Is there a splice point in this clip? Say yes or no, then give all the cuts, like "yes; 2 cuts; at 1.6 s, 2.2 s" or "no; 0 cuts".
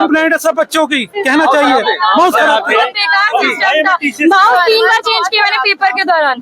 no; 0 cuts